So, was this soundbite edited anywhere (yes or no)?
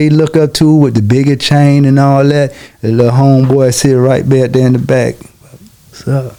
no